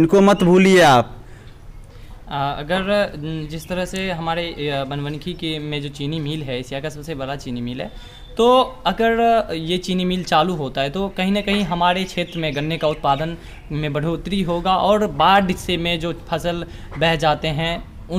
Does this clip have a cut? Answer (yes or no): no